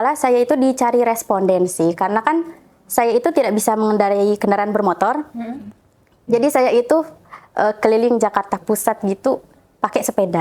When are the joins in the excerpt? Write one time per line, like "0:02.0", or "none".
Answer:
none